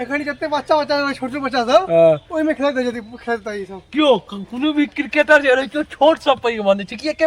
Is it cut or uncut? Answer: uncut